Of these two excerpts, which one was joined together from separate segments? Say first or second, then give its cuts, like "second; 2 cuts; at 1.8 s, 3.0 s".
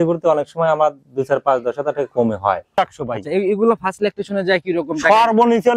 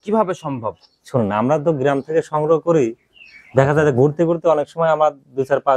first; 1 cut; at 2.7 s